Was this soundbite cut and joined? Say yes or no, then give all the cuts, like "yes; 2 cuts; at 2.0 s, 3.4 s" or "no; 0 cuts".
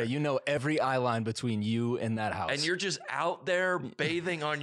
no; 0 cuts